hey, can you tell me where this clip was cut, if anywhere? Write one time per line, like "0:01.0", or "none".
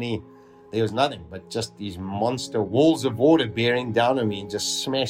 0:02.7